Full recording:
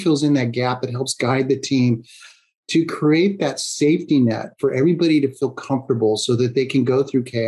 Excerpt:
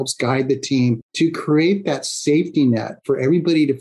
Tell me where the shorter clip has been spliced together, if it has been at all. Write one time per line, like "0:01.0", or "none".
0:01.1